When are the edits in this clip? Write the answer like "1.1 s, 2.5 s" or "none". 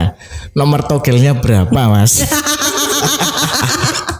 none